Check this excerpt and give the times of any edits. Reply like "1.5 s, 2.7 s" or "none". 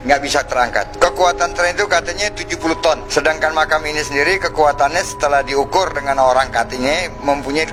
none